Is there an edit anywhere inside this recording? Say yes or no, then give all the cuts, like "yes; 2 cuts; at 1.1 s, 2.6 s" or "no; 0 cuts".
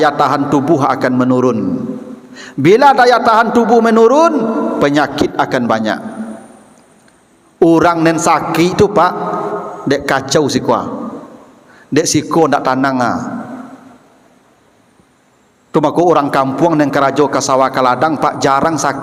no; 0 cuts